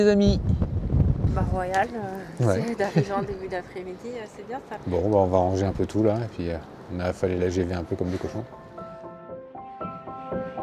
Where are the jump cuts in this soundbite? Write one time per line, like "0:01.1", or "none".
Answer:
0:01.3
0:04.8
0:08.5